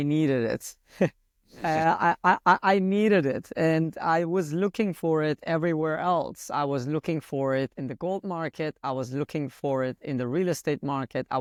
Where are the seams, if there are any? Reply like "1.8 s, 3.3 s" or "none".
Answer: none